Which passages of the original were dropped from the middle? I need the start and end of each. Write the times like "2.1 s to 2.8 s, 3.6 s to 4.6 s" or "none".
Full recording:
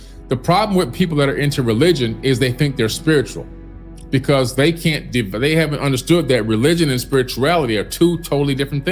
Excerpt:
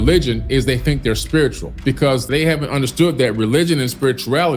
4.0 s to 5.3 s